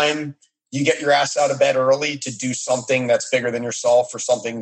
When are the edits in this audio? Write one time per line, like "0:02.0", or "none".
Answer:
none